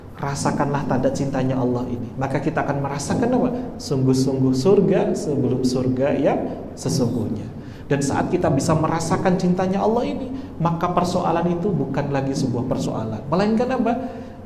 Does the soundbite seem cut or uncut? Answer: uncut